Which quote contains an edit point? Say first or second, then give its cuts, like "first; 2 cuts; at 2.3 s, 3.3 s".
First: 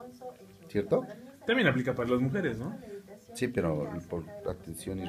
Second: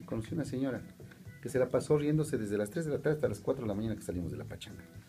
second; 1 cut; at 2.8 s